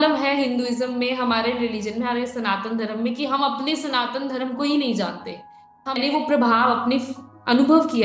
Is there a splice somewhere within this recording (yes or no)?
yes